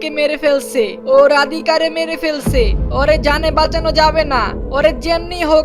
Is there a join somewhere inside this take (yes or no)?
yes